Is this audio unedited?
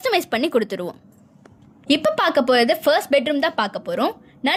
yes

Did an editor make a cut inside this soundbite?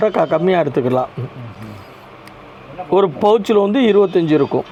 no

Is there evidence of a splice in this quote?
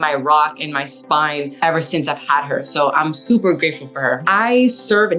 yes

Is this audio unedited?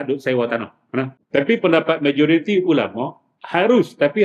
no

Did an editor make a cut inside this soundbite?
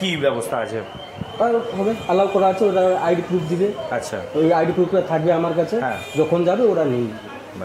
no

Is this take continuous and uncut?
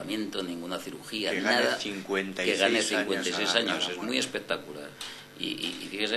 yes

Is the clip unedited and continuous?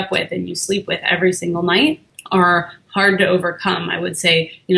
no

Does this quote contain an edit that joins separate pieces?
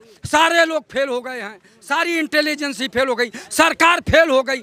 no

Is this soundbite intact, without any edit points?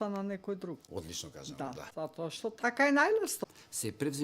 no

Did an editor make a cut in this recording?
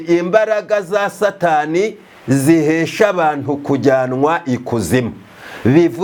no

